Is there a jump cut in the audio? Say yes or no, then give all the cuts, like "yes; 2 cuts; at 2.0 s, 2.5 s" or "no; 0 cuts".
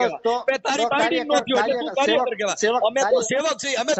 no; 0 cuts